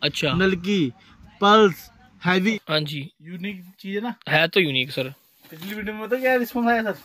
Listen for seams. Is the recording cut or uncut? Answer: cut